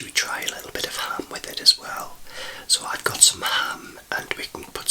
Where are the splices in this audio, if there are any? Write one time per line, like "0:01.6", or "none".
none